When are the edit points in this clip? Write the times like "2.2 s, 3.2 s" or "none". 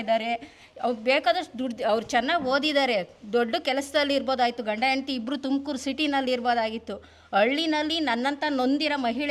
none